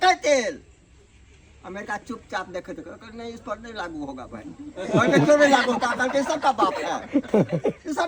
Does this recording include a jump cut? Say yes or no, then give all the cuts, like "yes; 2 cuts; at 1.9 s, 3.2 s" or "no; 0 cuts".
no; 0 cuts